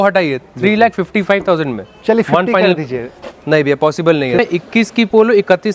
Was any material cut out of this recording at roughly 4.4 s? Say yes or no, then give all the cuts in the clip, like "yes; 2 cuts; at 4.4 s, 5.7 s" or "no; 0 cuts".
yes; 1 cut; at 4.4 s